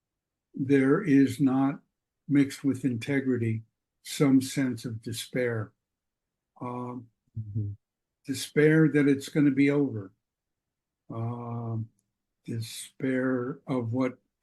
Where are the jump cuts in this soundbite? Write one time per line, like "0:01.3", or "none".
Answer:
none